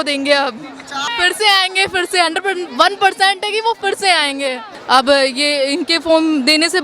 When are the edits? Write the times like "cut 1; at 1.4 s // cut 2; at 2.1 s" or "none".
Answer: cut 1; at 1.0 s // cut 2; at 4.7 s